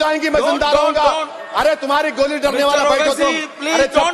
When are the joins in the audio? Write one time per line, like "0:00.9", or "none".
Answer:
none